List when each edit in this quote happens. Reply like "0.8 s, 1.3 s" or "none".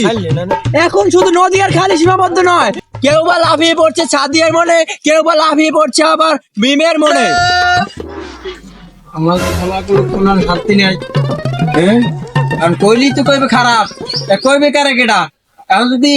7.3 s